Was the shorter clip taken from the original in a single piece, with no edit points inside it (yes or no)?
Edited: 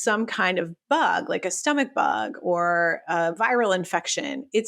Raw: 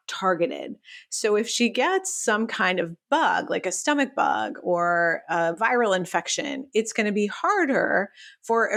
yes